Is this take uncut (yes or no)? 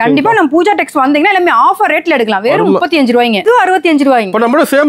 no